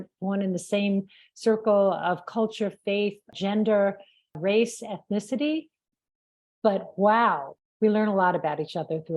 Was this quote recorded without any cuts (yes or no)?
no